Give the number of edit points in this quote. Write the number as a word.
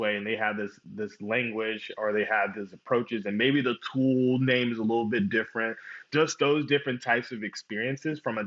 one